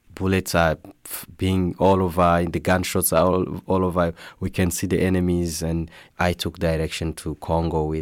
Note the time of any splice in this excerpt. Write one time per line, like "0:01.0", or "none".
0:06.0